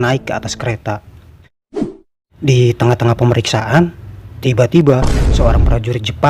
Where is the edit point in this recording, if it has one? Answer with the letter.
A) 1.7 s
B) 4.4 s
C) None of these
A